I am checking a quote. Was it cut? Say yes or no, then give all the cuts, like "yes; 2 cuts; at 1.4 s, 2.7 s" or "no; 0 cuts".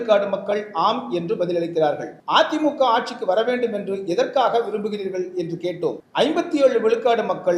yes; 2 cuts; at 2.1 s, 6.0 s